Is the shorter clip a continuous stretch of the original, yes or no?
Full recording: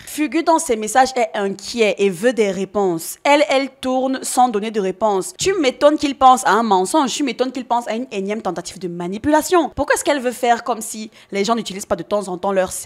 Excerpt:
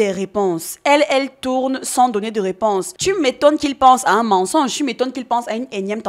yes